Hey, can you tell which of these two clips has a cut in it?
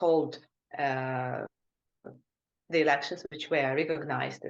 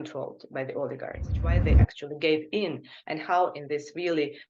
second; 1 cut; at 1.6 s

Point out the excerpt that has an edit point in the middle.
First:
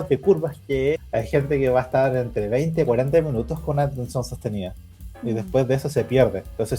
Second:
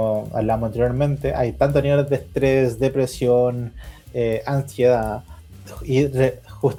first; 1 cut; at 1.0 s

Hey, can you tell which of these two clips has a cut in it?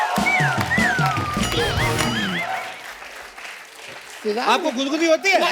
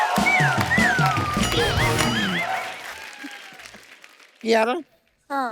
second; 1 cut; at 3.0 s

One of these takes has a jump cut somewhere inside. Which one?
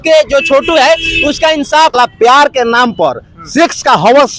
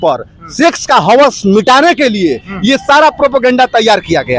first; 1 cut; at 1.9 s

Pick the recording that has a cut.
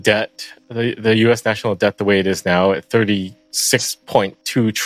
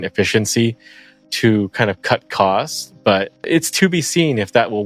second; 1 cut; at 3.4 s

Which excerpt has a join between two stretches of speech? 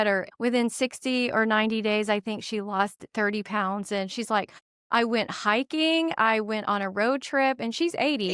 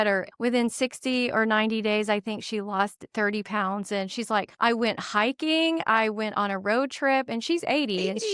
second; 1 cut; at 4.5 s

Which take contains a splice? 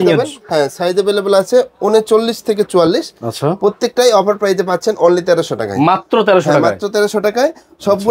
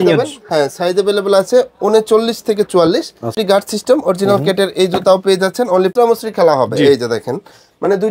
second; 2 cuts; at 3.3 s, 5.9 s

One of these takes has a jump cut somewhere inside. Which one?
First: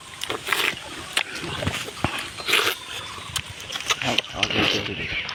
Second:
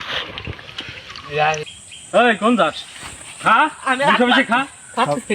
second; 1 cut; at 1.7 s

